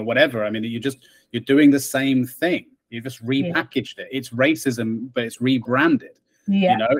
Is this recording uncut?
yes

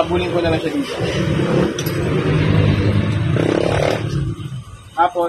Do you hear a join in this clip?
no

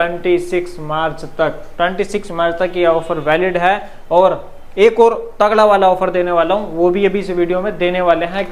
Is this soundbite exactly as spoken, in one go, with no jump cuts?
yes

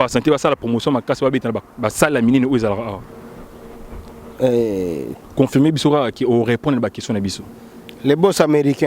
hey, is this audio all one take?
no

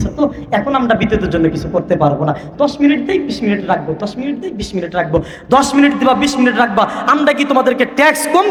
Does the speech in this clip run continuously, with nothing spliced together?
yes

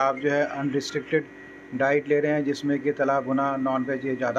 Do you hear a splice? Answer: no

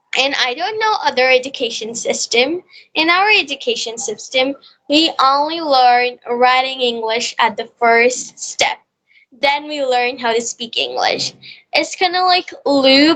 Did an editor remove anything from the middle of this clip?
no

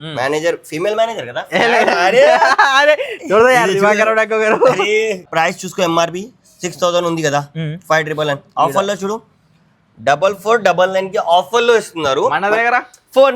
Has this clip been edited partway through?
yes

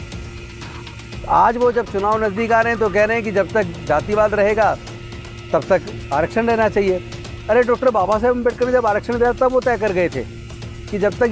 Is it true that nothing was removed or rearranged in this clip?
yes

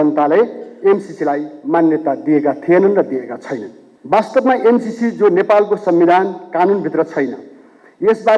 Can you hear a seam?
no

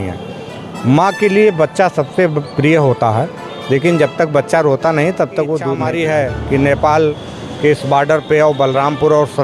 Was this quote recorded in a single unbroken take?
no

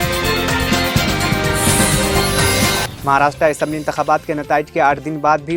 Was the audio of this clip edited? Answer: no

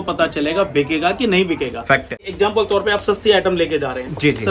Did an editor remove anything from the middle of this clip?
yes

